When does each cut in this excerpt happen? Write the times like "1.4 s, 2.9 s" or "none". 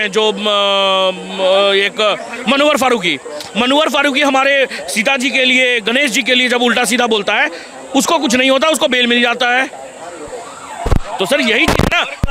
none